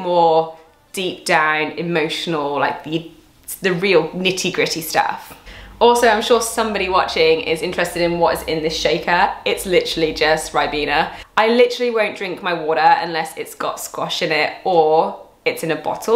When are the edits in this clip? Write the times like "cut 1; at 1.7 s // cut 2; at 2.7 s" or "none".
none